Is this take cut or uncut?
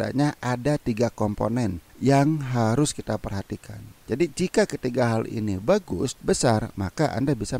cut